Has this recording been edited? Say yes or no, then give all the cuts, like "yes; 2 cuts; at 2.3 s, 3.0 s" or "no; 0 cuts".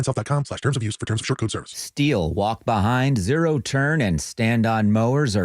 yes; 1 cut; at 1.8 s